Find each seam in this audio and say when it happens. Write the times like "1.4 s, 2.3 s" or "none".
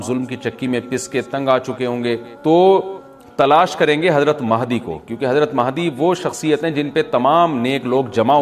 2.3 s